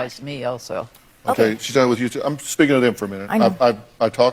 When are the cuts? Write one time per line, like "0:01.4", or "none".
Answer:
none